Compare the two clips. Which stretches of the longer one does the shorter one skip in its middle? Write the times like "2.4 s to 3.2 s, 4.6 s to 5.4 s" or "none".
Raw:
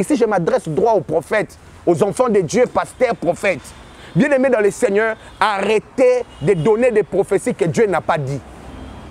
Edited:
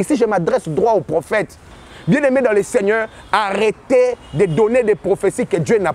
1.6 s to 3.7 s